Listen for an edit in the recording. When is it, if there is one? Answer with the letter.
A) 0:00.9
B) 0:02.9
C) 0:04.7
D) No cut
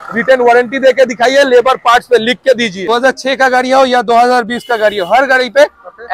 B